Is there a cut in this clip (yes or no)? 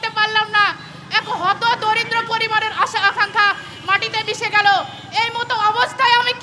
no